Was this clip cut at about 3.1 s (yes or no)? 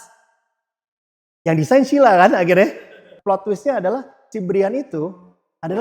yes